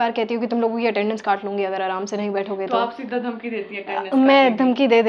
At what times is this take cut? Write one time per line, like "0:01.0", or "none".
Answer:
none